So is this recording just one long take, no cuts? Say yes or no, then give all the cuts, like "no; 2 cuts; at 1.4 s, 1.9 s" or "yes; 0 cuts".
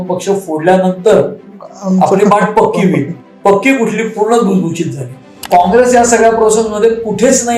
yes; 0 cuts